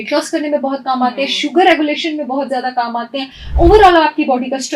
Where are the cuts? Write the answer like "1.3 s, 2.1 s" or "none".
none